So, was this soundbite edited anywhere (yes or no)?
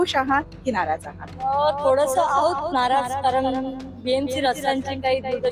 no